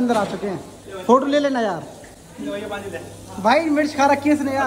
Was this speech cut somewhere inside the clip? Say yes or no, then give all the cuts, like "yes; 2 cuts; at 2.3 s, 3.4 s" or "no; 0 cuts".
no; 0 cuts